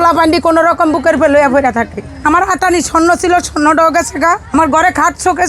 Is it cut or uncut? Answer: cut